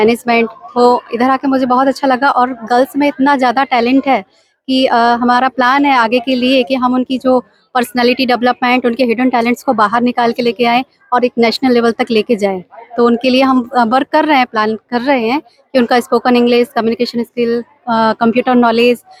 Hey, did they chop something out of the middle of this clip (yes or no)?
no